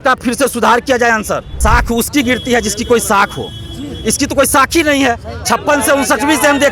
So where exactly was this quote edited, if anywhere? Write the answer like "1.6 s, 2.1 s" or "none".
1.6 s

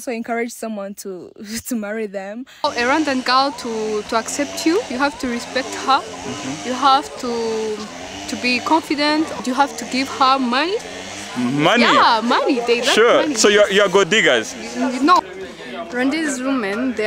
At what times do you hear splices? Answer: 2.6 s, 9.4 s, 15.2 s

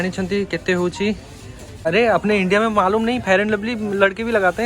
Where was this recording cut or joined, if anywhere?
1.9 s

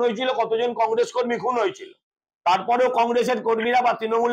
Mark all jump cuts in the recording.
none

